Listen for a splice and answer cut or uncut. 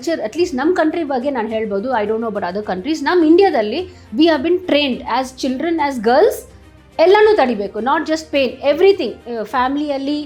uncut